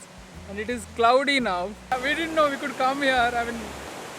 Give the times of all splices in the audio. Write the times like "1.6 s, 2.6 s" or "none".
1.9 s